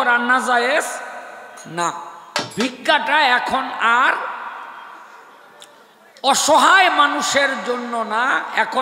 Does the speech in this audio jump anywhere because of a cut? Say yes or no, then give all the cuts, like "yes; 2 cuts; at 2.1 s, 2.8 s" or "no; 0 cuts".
yes; 1 cut; at 2.5 s